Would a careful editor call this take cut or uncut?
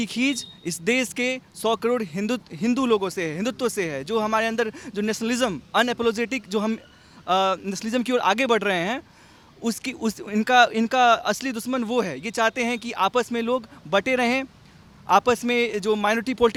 uncut